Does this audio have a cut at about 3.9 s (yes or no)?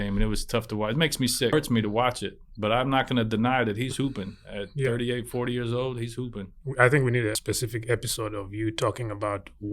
no